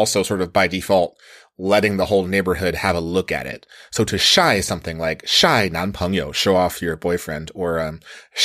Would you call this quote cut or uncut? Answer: uncut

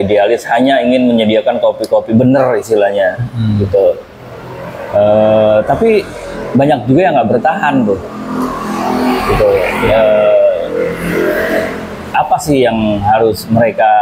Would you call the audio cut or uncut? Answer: uncut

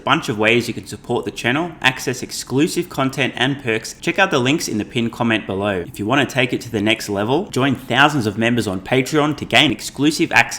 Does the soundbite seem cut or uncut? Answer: cut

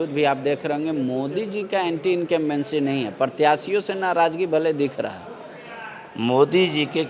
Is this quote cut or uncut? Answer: uncut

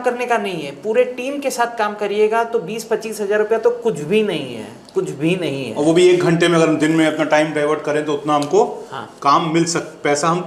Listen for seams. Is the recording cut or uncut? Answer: uncut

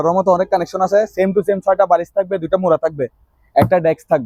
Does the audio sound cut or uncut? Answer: uncut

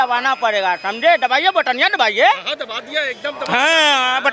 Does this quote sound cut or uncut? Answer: uncut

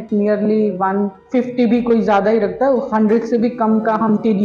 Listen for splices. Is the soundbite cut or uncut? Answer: uncut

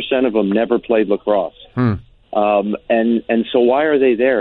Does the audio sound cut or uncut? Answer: uncut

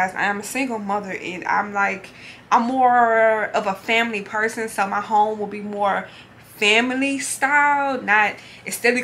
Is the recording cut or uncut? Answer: uncut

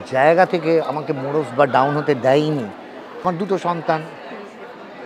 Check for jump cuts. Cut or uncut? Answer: cut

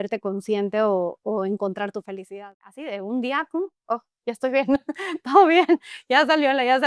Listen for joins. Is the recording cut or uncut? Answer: cut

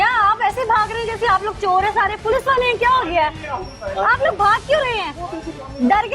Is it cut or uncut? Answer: uncut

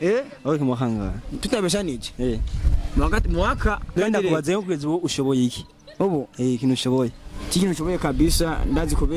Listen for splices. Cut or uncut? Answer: cut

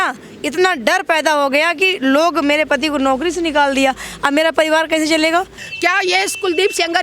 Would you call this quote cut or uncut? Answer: cut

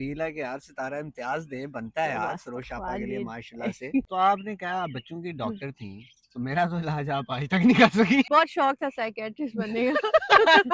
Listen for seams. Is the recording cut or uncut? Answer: cut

